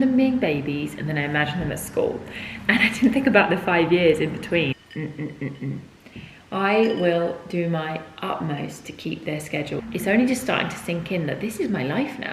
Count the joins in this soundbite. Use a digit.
2